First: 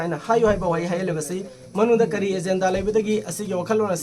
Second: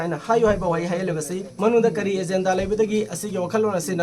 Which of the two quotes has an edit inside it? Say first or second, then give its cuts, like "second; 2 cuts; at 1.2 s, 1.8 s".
second; 1 cut; at 1.4 s